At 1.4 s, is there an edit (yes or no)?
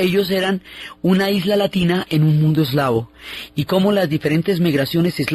no